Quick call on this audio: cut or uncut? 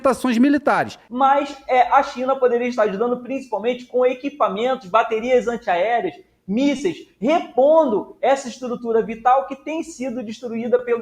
cut